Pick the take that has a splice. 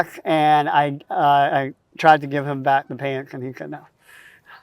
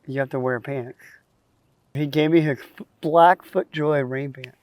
second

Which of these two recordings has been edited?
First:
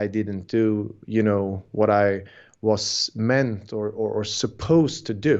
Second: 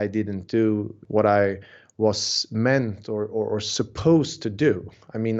second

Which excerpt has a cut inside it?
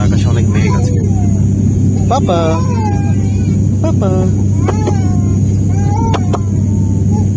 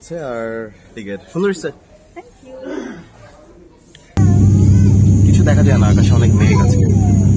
second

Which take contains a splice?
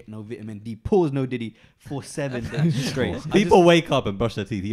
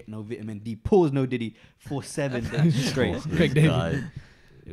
first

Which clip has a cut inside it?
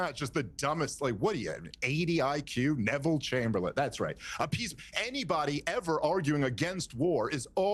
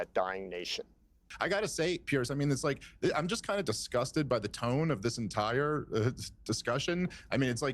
second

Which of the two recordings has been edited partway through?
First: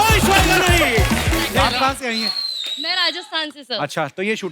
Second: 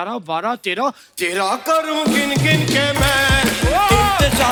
first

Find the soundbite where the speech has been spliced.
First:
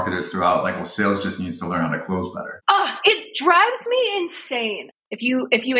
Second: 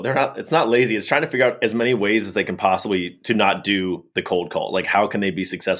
first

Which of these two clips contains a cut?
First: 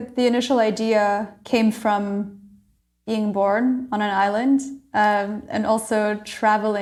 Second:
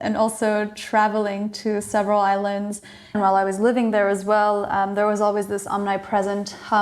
second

